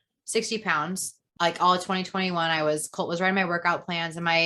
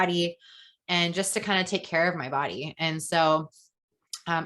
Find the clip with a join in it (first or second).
first